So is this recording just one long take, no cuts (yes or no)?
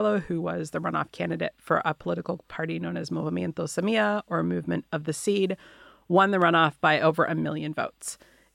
yes